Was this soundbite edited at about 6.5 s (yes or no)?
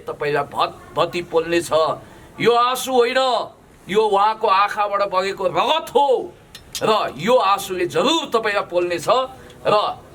no